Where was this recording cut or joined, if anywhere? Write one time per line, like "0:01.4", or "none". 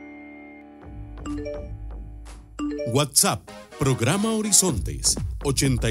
0:01.2